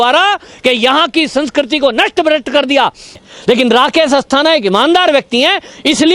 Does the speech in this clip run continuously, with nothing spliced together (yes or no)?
no